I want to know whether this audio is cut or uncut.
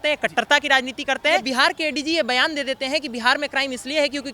cut